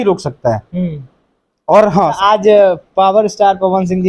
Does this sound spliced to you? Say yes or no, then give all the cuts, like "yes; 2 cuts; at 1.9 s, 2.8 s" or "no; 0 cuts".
yes; 1 cut; at 2.2 s